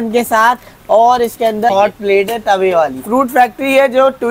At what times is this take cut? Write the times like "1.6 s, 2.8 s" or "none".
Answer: 1.7 s, 3.0 s